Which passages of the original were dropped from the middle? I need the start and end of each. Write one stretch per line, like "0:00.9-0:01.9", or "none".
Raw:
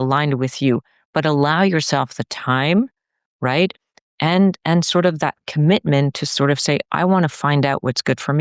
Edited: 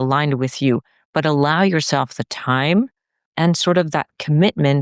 0:03.3-0:04.6

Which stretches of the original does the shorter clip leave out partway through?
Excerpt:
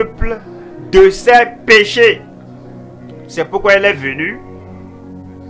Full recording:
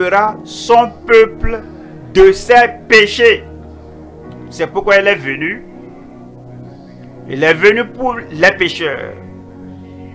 0:05.8-0:09.1

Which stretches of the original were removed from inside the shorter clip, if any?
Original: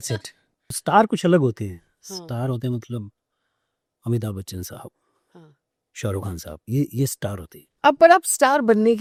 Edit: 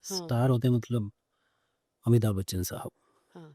none

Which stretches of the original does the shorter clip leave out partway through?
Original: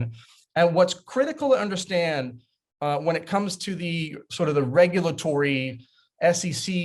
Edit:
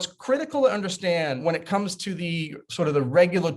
0:02.3-0:03.0

